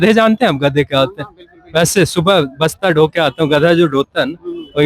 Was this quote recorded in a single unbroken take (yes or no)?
yes